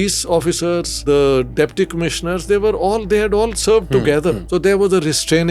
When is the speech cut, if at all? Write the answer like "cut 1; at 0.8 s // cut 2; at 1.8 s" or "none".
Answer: cut 1; at 0.9 s // cut 2; at 4.4 s